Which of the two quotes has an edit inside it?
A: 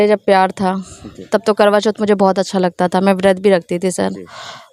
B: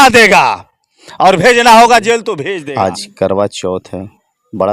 B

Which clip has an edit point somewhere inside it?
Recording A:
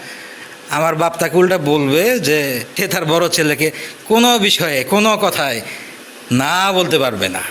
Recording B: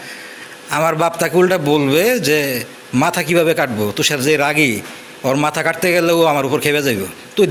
A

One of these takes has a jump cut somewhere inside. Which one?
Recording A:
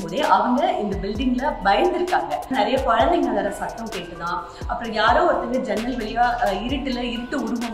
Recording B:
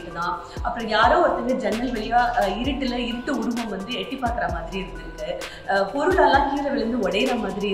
A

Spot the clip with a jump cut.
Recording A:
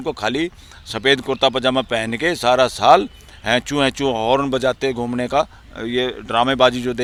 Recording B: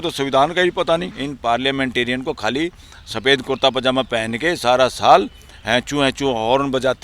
B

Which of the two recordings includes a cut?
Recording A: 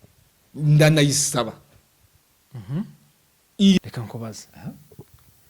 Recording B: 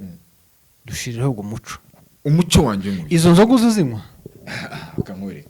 A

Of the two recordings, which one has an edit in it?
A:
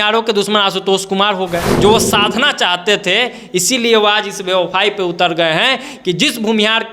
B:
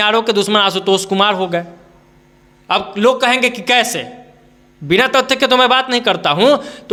A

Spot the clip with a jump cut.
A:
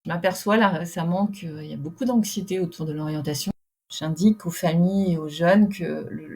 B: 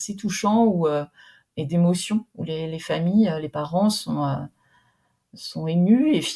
A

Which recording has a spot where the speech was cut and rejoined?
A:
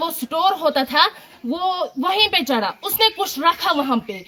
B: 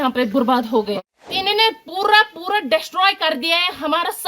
B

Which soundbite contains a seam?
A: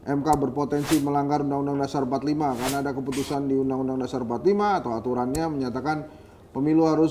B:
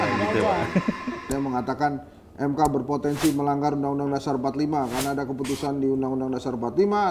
B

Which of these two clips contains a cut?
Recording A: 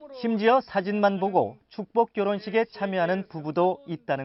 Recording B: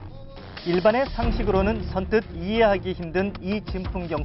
B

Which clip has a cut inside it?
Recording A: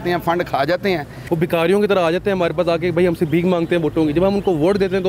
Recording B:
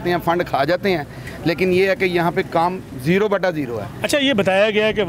A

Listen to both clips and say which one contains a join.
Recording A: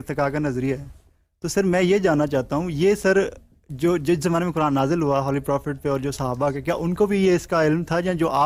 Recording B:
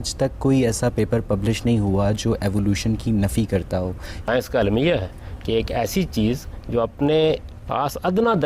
B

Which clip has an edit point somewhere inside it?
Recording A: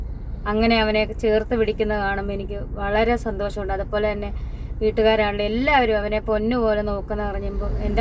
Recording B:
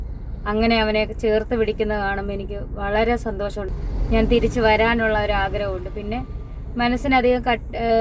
B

